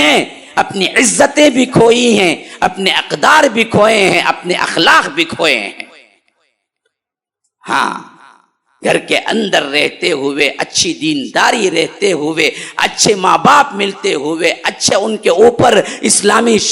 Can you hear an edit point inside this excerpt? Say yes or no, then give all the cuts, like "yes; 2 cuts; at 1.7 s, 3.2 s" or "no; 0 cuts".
no; 0 cuts